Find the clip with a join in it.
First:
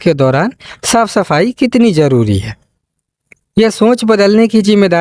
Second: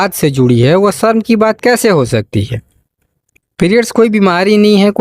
second; 1 cut; at 3.9 s

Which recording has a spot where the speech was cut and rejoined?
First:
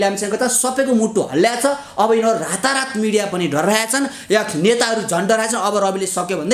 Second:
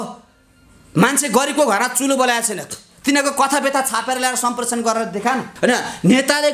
second; 1 cut; at 5.5 s

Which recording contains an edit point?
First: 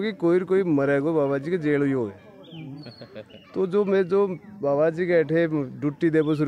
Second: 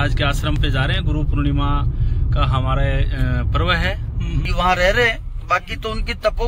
second; 1 cut; at 4.5 s

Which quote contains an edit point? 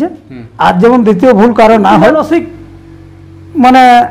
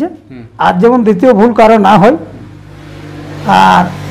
first; 1 cut; at 2.3 s

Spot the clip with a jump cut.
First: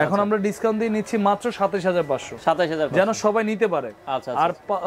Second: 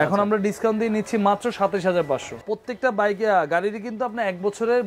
second; 1 cut; at 2.4 s

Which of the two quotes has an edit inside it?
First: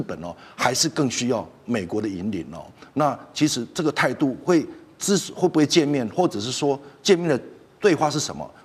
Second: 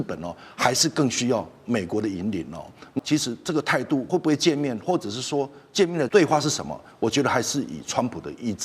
second; 3 cuts; at 3.0 s, 4.1 s, 6.1 s

